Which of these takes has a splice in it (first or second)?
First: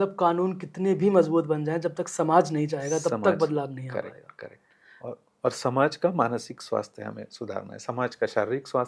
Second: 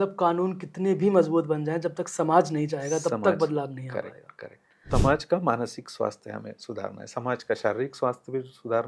second